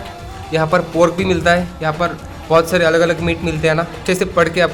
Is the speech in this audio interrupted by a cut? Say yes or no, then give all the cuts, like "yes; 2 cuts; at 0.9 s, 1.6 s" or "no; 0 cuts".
no; 0 cuts